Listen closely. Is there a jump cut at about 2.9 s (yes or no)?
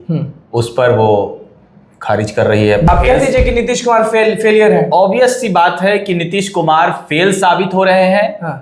yes